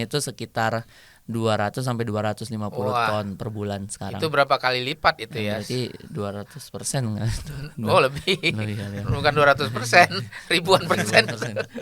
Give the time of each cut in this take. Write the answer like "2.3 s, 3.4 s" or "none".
none